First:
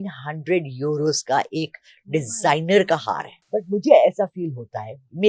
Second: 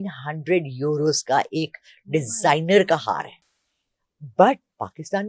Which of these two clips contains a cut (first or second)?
first